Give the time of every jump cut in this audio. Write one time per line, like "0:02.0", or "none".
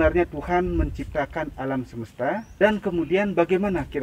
0:02.5